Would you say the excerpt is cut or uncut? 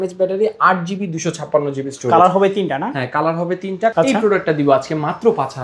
cut